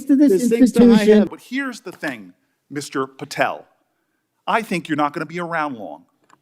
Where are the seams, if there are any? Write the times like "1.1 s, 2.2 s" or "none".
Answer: 1.3 s